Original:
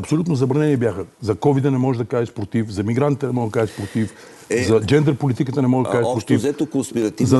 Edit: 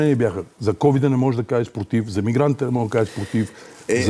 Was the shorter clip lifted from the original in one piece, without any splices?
yes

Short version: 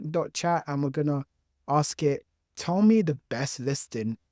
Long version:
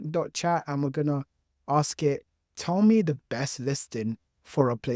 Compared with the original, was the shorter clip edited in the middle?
no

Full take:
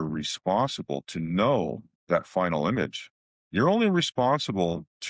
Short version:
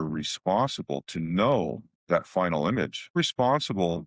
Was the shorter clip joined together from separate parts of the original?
yes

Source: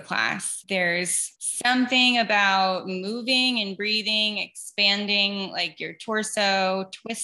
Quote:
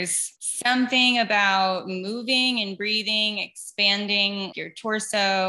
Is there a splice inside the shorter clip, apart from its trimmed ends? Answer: yes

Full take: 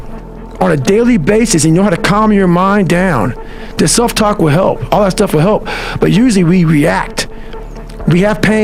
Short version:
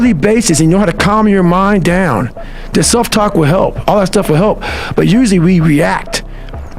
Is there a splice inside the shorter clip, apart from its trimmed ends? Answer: no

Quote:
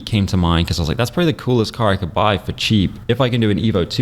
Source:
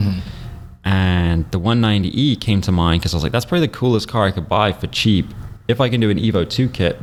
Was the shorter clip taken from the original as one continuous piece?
no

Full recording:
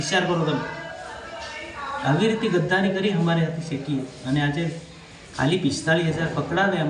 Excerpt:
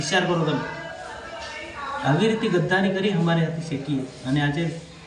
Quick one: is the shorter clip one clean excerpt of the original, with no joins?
yes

